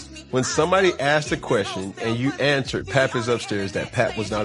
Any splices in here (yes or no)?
no